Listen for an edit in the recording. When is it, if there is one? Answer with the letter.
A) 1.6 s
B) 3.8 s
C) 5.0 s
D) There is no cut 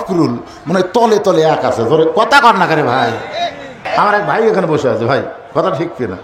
B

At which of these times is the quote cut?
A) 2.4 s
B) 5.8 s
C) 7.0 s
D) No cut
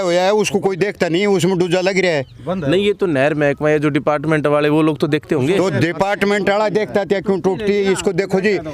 D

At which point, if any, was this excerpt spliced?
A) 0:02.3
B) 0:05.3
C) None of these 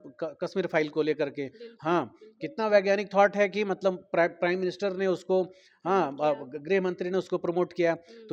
C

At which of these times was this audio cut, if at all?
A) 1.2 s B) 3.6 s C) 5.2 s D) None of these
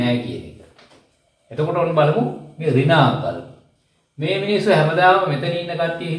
D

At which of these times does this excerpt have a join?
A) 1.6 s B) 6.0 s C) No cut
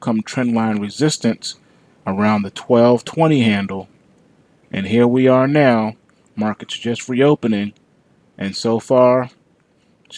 C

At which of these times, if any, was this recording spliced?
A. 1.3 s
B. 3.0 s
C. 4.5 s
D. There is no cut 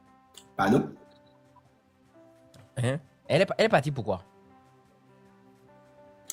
D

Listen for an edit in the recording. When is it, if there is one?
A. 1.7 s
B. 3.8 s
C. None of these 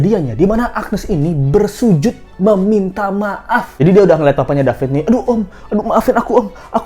C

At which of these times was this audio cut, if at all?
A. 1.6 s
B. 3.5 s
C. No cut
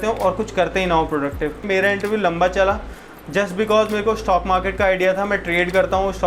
A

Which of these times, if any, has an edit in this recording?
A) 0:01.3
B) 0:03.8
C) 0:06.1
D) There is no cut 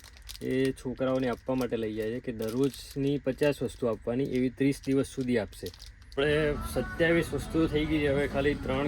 C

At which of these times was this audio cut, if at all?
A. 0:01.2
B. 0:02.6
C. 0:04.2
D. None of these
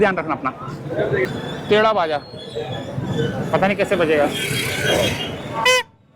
A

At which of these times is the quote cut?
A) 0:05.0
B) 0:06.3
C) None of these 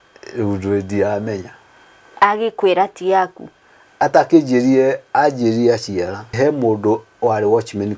B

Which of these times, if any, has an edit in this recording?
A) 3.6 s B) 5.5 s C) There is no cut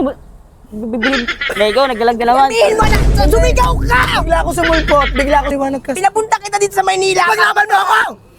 B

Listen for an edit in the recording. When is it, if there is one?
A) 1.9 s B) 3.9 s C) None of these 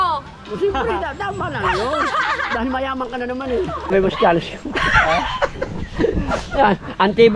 B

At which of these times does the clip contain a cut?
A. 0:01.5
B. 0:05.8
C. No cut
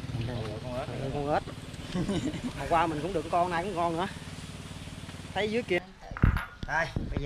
B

